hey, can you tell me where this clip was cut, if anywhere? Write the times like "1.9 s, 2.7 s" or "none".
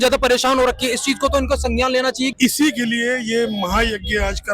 2.3 s